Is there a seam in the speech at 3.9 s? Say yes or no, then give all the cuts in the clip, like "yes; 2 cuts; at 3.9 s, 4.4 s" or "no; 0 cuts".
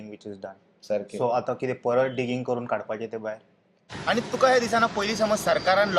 yes; 1 cut; at 3.9 s